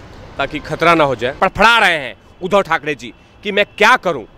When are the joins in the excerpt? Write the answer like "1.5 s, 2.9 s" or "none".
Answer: 1.3 s